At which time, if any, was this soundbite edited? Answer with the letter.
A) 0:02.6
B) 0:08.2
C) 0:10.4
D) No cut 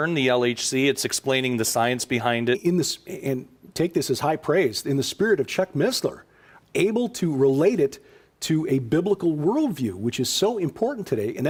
D